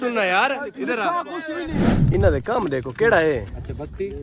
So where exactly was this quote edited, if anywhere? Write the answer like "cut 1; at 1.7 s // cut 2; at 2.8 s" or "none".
cut 1; at 1.9 s